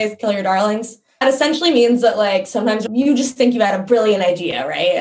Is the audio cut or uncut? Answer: cut